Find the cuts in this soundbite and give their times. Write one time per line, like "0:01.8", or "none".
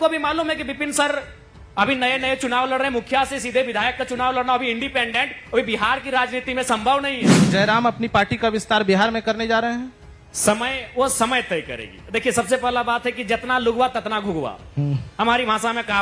0:07.4